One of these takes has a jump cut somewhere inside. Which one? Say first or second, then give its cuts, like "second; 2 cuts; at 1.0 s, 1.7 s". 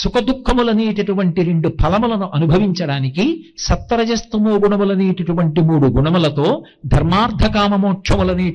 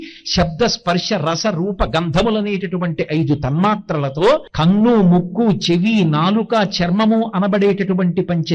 second; 1 cut; at 4.5 s